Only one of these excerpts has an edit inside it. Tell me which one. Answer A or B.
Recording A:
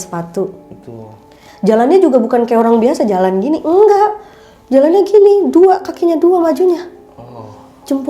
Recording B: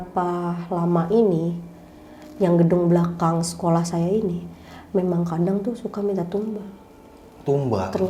A